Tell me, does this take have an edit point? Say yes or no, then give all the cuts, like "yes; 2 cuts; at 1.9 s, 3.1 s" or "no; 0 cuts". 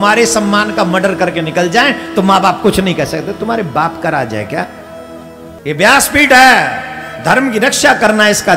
yes; 1 cut; at 5.5 s